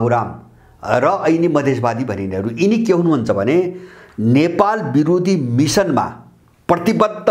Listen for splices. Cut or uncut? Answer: uncut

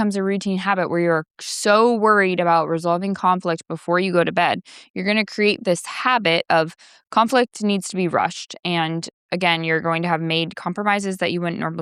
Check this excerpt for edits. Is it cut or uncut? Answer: uncut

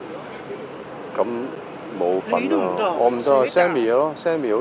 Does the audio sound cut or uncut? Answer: uncut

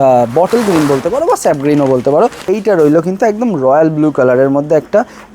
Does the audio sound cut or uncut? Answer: cut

